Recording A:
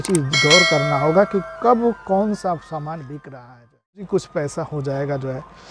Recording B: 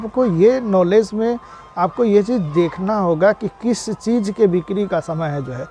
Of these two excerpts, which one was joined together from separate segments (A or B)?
A